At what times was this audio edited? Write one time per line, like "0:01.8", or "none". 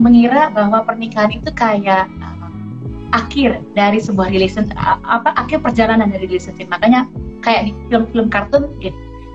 none